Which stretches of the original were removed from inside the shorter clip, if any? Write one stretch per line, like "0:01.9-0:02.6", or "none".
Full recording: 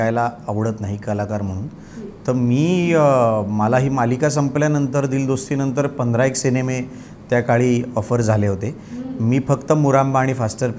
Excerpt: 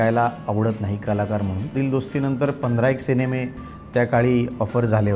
0:01.7-0:05.1